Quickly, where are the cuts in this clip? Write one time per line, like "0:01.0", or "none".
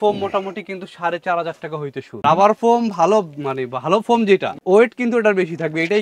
0:02.2
0:04.6